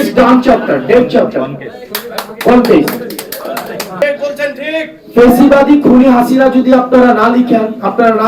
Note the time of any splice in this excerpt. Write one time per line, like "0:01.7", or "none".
0:04.0